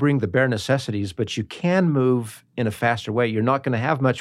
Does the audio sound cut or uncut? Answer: uncut